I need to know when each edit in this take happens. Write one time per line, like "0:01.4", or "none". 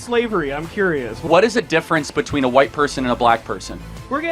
0:01.2